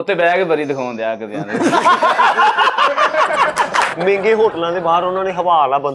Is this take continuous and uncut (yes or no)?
no